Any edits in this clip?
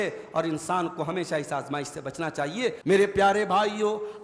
yes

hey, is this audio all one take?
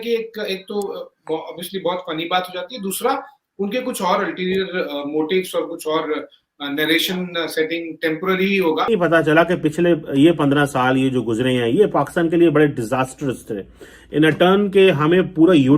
no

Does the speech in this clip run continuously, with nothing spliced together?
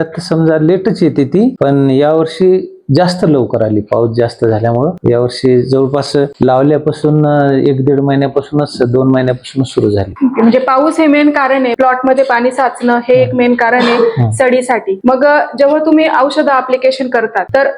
yes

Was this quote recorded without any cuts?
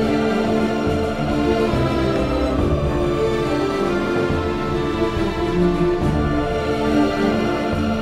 yes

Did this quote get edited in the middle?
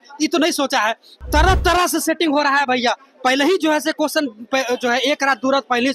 yes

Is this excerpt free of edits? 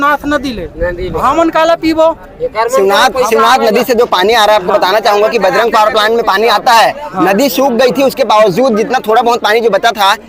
yes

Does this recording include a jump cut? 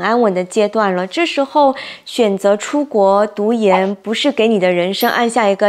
no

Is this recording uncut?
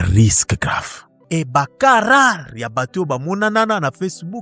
no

